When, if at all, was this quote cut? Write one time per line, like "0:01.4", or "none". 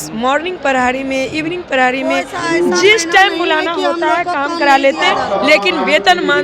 none